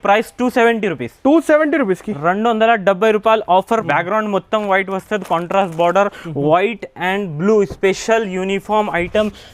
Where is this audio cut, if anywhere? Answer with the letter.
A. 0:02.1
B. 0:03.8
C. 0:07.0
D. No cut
B